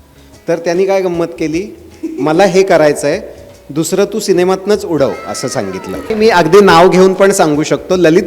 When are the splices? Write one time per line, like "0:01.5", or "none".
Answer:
0:06.0